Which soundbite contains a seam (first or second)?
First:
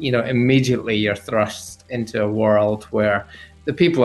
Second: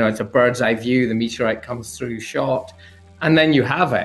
first